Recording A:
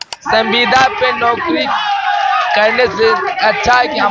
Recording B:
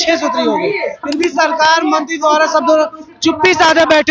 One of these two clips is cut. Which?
B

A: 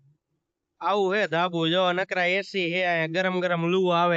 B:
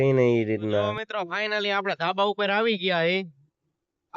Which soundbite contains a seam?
B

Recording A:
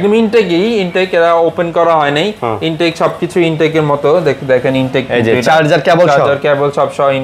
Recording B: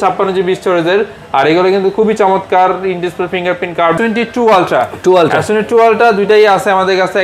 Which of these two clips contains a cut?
B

